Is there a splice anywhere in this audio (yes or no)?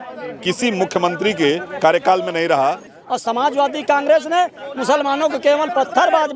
yes